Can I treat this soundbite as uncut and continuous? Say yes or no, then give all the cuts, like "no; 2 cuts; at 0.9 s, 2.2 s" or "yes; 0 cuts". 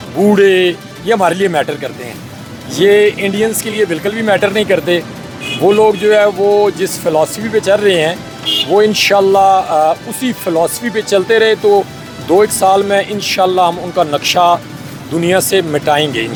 yes; 0 cuts